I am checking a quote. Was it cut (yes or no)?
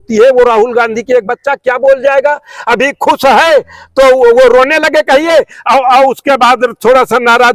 no